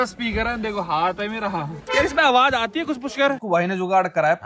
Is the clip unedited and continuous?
no; 2 cuts; at 1.8 s, 3.4 s

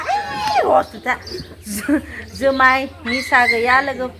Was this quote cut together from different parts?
no; 0 cuts

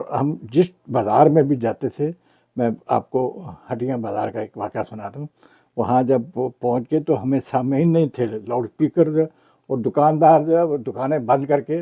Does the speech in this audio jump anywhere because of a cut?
no; 0 cuts

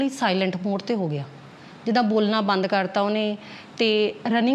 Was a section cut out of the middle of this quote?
no; 0 cuts

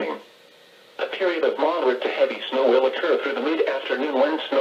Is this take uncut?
yes; 0 cuts

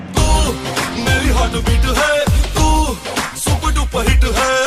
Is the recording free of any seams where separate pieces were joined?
yes; 0 cuts

